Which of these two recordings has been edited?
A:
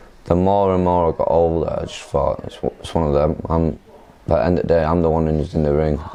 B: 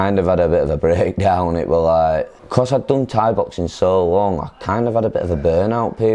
B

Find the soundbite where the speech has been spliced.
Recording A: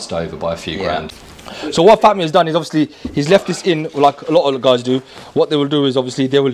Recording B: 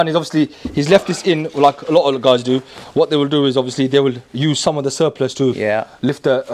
A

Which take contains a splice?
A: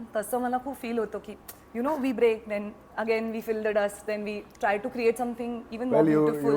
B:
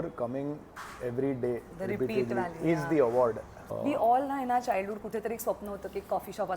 B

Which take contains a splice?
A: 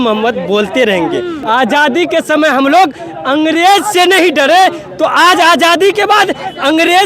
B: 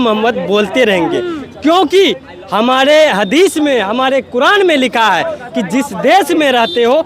A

